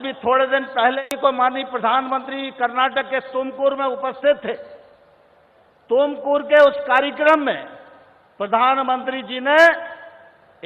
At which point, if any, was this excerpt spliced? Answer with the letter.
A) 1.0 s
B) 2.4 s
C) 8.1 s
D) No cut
A